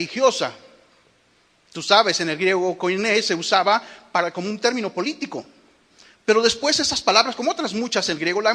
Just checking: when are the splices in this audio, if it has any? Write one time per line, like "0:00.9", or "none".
0:07.6